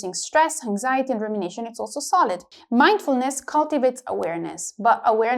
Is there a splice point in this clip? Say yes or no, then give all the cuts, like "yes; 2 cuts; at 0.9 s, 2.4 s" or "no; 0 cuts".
yes; 1 cut; at 2.4 s